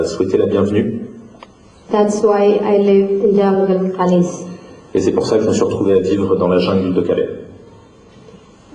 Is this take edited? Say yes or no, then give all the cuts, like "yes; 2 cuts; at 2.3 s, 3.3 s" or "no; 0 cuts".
yes; 1 cut; at 2.8 s